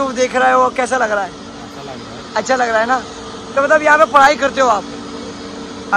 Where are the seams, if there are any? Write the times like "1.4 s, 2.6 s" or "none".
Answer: none